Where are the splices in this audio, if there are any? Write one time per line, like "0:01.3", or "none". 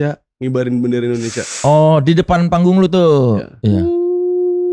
none